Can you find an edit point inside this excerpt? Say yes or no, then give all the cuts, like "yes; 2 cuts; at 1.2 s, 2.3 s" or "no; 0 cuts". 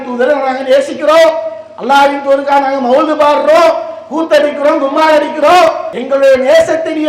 yes; 1 cut; at 5.9 s